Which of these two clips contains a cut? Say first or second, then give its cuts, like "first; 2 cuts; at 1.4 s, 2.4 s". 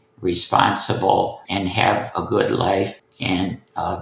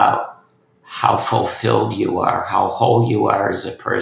first; 2 cuts; at 1.4 s, 3.1 s